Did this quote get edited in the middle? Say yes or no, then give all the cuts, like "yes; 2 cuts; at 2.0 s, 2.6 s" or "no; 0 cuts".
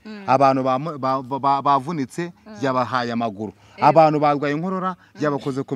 no; 0 cuts